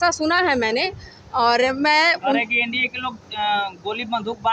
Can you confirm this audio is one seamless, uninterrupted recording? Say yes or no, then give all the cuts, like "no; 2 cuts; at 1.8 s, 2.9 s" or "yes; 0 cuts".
yes; 0 cuts